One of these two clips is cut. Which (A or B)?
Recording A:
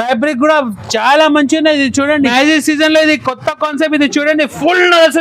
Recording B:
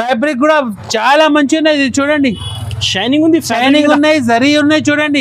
A